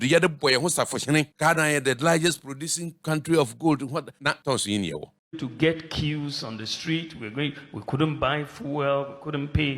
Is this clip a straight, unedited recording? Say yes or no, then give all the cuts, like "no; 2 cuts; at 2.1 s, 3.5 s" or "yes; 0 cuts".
no; 4 cuts; at 1.3 s, 3.0 s, 4.2 s, 5.2 s